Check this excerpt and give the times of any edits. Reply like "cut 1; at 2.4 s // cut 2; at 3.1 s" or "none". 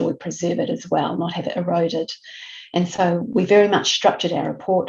none